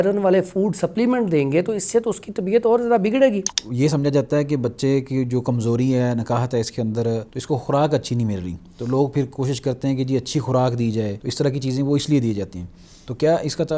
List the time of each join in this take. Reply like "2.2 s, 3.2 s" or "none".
3.6 s, 7.3 s, 11.2 s